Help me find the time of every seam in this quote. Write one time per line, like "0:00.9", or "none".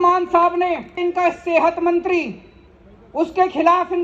0:01.0